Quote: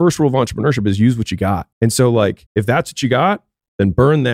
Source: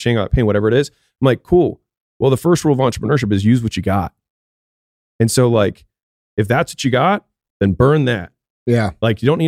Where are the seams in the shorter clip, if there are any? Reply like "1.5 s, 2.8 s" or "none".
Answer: 1.7 s, 2.4 s

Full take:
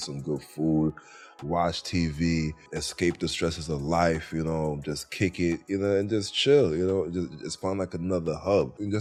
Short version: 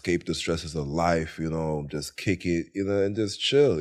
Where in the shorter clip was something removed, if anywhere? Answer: none

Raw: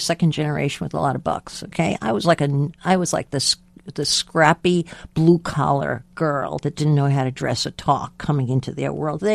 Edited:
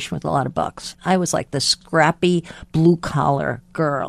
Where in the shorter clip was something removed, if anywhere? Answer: 0.9 s, 1.8 s

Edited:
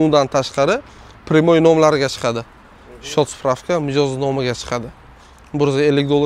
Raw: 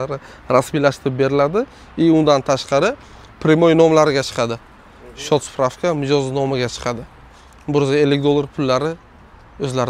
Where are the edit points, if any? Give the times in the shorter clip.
none

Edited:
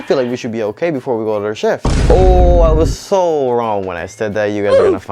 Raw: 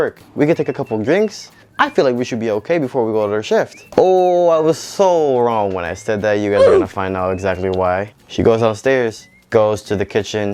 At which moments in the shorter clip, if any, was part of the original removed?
none

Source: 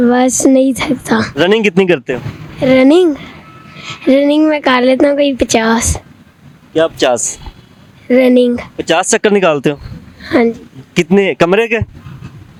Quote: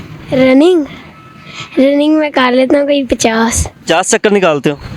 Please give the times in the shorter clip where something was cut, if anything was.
3.7 s

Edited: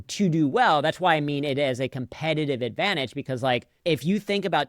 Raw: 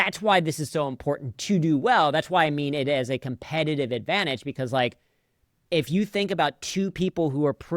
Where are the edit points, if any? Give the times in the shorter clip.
3.7 s

